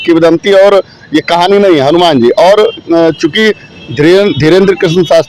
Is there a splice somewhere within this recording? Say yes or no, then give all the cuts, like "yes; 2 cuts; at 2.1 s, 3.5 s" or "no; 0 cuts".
no; 0 cuts